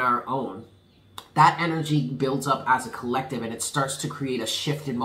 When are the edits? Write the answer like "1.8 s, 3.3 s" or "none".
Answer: none